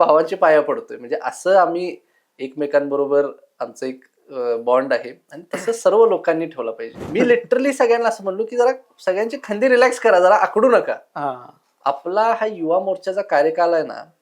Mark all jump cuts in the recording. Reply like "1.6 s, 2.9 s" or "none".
7.1 s